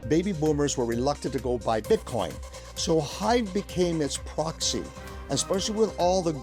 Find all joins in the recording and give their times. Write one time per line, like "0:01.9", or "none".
none